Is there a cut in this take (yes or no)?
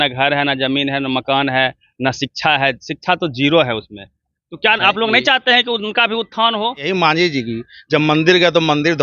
yes